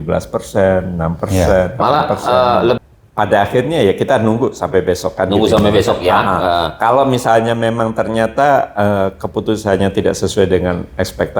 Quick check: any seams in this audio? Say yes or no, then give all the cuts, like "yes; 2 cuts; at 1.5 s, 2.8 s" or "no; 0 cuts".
yes; 1 cut; at 2.8 s